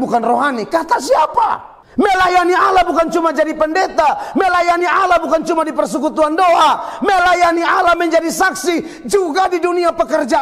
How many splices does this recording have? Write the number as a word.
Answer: one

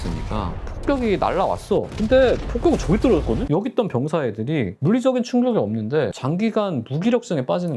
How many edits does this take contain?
zero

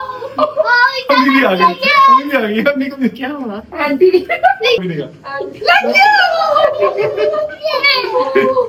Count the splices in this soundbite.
zero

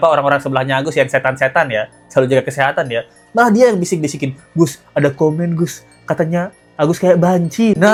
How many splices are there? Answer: zero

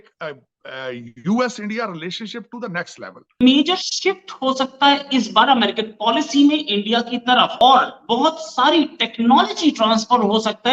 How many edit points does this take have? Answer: two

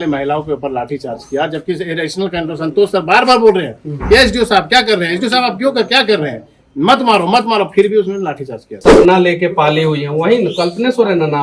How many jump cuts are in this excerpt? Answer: one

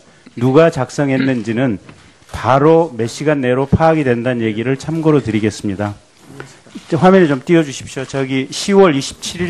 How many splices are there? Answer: zero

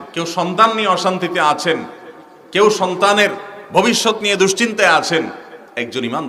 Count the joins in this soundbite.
zero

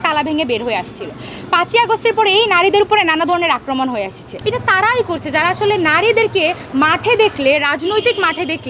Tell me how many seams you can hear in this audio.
one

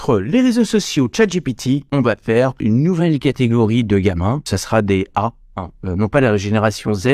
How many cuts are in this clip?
zero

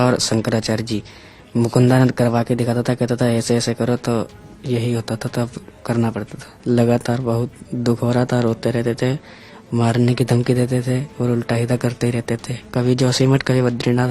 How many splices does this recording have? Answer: one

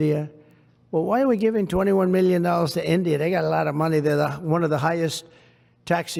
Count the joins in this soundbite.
zero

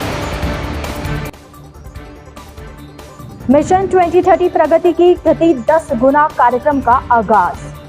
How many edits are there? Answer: one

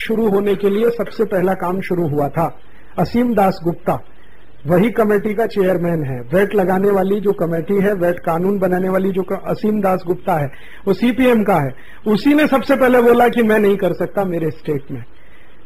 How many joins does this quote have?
one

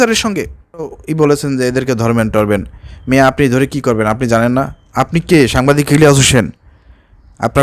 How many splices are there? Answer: one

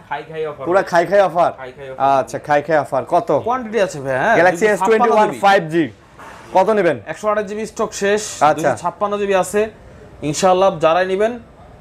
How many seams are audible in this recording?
zero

